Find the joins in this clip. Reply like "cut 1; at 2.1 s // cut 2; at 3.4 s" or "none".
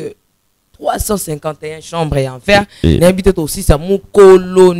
none